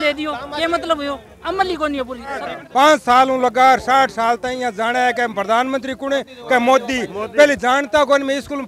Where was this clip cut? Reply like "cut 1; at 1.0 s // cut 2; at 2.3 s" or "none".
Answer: cut 1; at 2.6 s

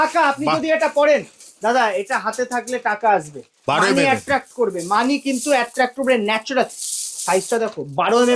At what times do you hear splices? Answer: none

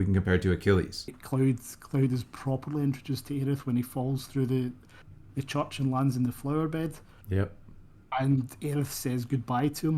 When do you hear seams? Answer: cut 1; at 1.2 s

